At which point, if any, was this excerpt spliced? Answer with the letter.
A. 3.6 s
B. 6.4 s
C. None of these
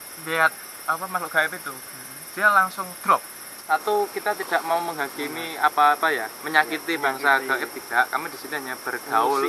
A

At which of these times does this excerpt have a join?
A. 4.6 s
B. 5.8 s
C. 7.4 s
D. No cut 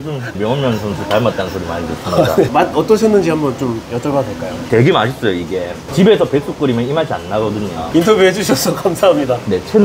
A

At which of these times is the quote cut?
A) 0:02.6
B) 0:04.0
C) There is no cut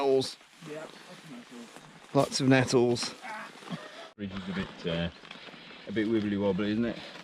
B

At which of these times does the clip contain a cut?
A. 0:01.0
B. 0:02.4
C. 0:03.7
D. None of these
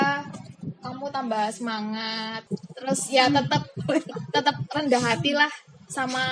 B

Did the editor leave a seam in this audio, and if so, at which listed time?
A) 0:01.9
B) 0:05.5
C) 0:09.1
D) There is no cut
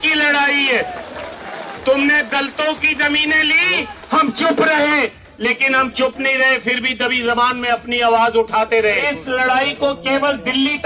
C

